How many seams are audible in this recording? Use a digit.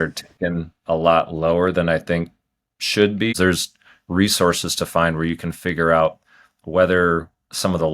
1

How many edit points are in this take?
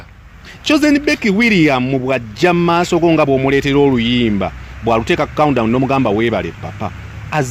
0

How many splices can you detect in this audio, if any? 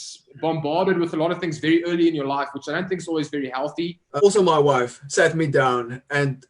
1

